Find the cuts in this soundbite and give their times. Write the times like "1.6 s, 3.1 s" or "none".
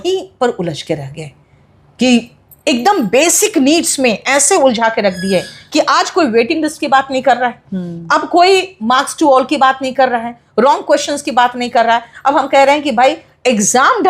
none

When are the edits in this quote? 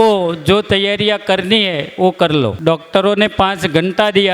2.6 s

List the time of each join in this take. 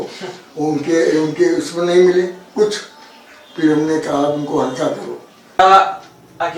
5.6 s

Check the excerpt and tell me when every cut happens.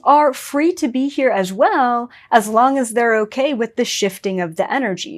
none

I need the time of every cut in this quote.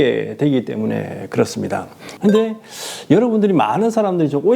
2.0 s

